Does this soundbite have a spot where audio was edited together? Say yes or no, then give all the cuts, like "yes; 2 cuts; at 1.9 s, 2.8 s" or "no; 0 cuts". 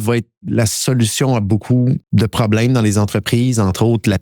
yes; 1 cut; at 2.0 s